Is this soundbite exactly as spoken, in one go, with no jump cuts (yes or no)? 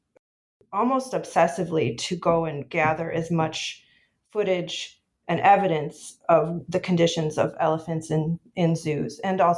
yes